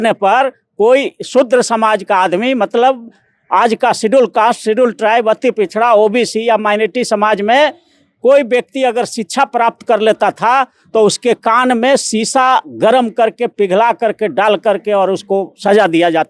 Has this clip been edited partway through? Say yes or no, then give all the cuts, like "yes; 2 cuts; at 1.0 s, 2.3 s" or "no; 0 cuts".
no; 0 cuts